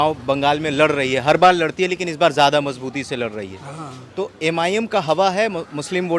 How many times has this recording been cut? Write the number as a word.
zero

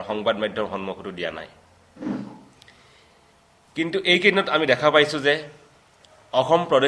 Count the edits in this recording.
zero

